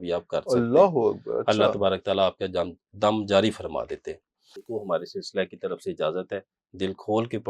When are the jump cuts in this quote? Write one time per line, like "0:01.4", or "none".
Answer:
0:04.6